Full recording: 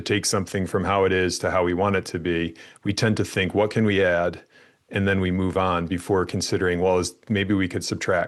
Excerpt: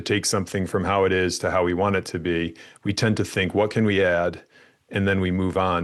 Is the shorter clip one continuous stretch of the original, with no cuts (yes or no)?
yes